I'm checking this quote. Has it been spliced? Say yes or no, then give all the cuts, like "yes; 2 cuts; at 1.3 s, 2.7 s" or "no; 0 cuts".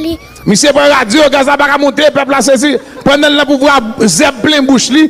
yes; 1 cut; at 2.9 s